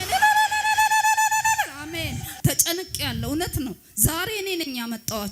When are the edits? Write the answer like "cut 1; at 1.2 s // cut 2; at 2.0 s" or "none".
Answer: cut 1; at 2.3 s